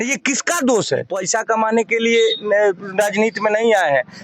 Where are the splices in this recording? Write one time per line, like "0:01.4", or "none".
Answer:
0:01.2